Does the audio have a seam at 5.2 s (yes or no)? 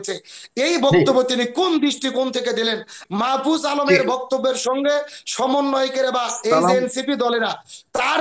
no